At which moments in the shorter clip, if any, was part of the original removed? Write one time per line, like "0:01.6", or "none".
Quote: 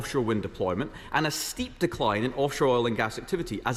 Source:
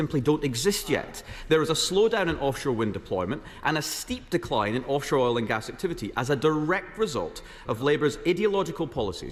none